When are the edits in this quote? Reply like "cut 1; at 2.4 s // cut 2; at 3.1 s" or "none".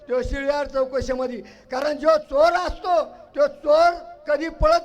none